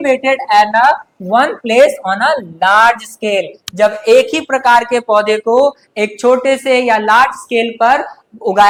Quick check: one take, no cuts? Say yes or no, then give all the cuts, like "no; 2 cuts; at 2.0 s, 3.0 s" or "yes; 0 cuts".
yes; 0 cuts